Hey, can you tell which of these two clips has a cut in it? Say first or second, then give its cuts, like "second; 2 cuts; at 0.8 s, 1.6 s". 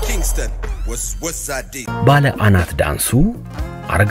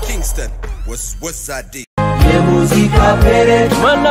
first; 1 cut; at 1.7 s